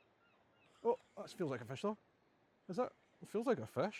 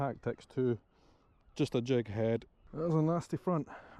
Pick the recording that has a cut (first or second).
second